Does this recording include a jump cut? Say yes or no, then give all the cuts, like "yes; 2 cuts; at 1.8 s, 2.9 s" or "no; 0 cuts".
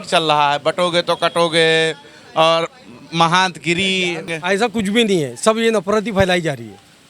yes; 1 cut; at 4.3 s